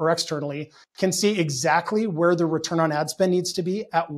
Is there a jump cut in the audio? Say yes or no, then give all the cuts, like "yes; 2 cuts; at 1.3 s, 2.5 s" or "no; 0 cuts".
no; 0 cuts